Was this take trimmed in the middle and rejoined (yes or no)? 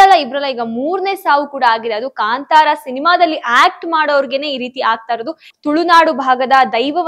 yes